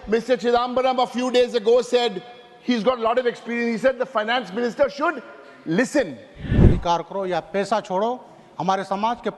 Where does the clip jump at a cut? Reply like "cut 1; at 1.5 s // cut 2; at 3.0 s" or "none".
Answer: cut 1; at 6.6 s